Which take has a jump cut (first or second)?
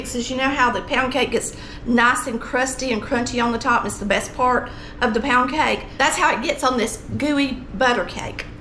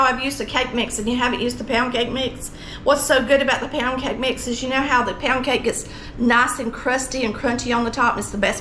first